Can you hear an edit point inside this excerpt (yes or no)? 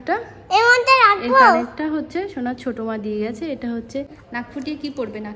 yes